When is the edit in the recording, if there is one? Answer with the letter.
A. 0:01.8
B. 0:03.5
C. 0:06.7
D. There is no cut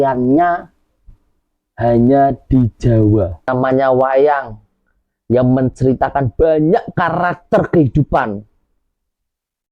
B